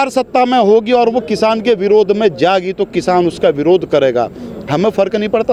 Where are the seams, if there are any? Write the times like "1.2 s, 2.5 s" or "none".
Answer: none